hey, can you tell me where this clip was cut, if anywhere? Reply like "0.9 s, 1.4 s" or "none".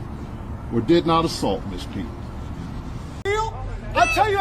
3.2 s